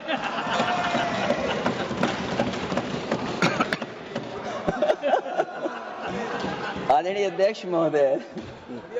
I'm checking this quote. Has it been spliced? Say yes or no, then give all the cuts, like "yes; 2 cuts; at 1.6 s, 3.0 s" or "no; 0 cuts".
no; 0 cuts